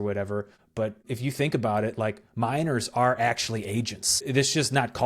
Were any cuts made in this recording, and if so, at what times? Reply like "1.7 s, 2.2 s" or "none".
0.9 s, 4.3 s